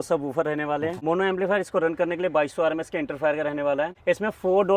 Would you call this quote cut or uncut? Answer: cut